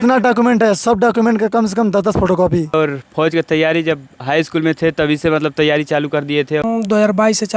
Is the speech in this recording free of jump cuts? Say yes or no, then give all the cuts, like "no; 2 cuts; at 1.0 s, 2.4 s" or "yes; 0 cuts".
no; 2 cuts; at 2.7 s, 6.6 s